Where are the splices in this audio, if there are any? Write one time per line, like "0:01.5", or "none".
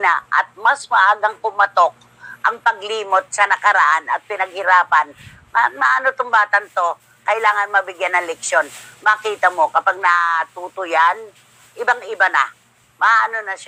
none

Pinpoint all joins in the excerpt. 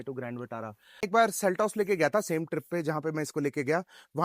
0:01.1

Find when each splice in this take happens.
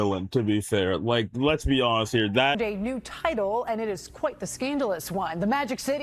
0:02.6

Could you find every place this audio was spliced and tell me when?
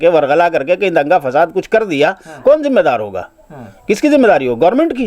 none

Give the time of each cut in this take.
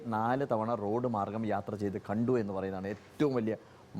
none

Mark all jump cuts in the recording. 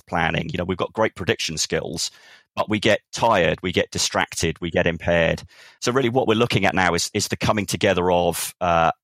0:05.7

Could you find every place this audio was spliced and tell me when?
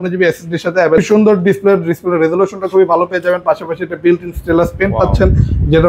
0:01.0

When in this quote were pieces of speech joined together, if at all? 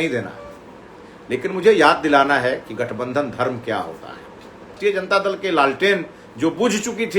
0:04.8

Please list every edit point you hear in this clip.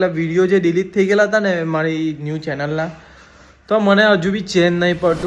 none

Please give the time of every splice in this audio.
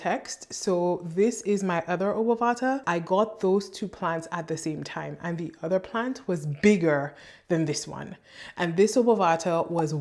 0:02.8

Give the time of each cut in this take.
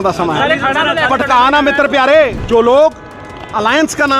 0:02.4

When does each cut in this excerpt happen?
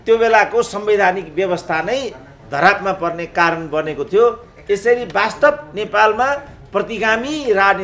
none

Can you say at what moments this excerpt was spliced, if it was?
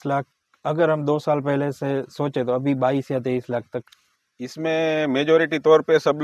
0:03.9

